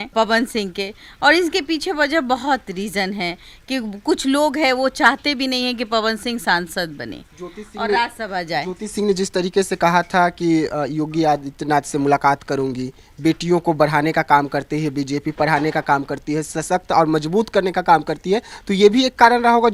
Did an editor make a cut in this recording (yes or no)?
no